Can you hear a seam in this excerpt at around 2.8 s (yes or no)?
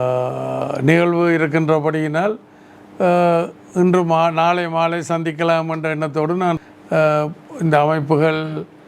no